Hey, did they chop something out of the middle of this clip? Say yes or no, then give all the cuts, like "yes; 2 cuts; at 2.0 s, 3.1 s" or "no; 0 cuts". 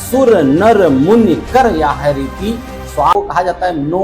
yes; 1 cut; at 3.1 s